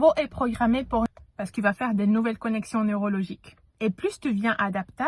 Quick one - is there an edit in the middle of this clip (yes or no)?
yes